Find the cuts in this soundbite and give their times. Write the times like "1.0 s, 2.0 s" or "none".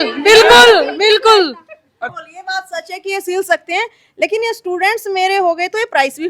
2.2 s